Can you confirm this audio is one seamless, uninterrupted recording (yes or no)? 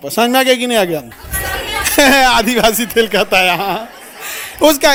yes